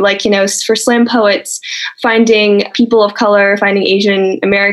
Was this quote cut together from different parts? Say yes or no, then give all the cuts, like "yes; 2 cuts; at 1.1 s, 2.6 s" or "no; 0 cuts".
yes; 2 cuts; at 1.9 s, 2.7 s